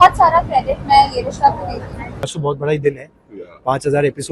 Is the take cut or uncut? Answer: cut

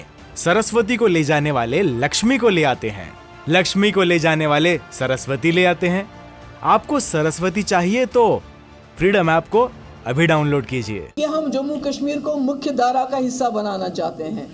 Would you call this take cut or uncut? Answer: cut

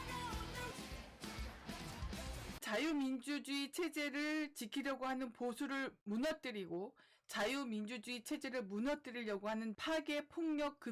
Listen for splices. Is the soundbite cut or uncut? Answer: cut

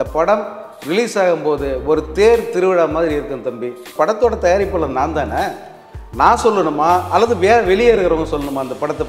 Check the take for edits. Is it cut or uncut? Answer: cut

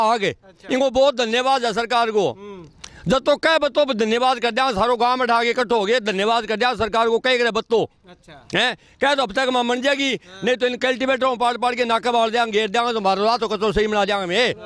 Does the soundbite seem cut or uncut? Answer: uncut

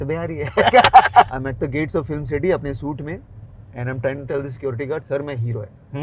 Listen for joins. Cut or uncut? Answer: cut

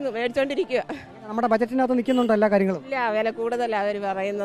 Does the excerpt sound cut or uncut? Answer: uncut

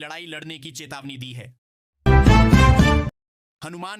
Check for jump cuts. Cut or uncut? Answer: uncut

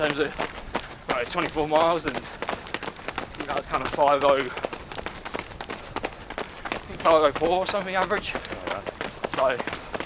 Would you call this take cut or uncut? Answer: uncut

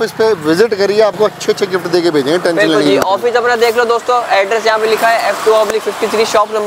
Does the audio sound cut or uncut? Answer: uncut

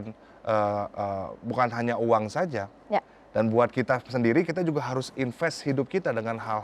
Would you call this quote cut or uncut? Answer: uncut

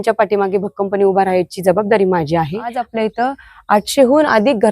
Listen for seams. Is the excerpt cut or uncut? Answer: cut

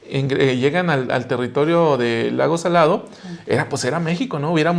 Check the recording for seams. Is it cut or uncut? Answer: uncut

